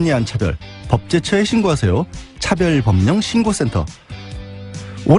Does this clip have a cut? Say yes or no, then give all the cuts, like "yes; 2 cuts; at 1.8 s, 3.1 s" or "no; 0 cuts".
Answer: yes; 1 cut; at 2.8 s